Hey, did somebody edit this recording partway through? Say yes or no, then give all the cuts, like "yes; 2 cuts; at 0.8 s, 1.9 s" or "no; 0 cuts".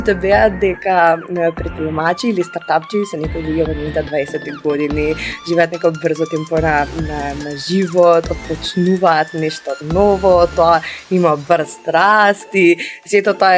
no; 0 cuts